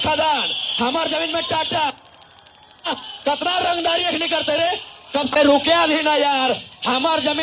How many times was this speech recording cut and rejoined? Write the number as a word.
one